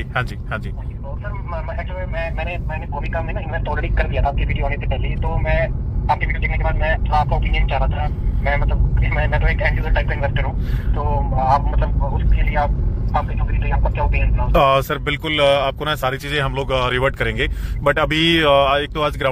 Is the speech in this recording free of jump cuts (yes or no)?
yes